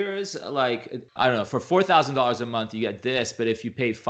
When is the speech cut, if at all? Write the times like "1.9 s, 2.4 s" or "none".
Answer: 1.0 s